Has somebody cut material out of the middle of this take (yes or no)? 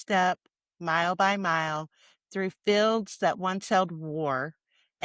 no